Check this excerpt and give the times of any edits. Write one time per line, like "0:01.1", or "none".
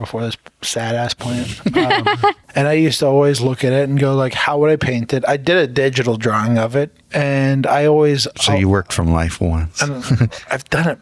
0:02.4
0:07.0